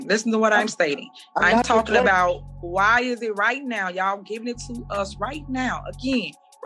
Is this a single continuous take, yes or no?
yes